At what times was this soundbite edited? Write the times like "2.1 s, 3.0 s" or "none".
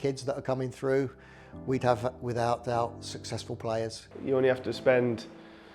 4.1 s

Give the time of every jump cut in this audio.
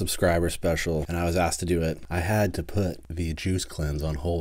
1.1 s, 2.0 s, 3.0 s

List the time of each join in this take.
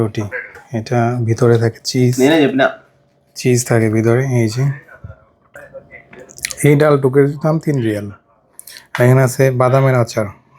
5.6 s

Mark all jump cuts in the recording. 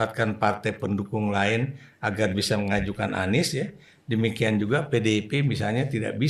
none

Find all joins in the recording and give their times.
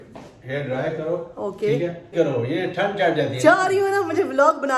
2.1 s

